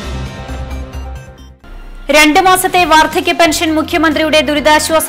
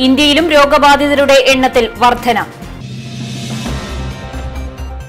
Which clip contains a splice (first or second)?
first